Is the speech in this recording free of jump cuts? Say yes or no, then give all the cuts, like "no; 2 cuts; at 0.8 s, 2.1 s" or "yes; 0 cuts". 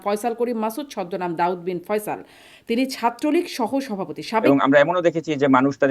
no; 1 cut; at 4.4 s